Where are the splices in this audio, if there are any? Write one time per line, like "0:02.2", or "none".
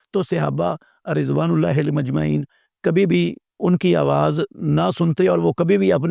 none